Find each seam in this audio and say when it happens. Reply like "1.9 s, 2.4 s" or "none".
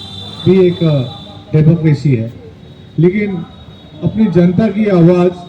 none

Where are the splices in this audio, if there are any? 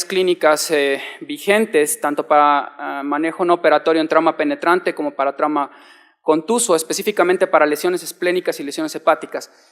0.9 s

